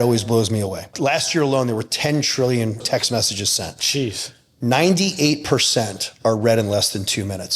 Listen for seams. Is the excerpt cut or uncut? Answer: cut